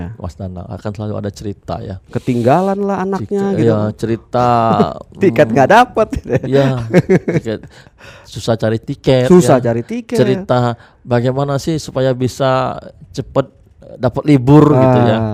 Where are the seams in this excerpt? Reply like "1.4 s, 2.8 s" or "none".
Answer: none